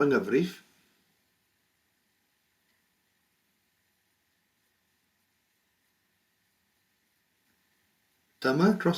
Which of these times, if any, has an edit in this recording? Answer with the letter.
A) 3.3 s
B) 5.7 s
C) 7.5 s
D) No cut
C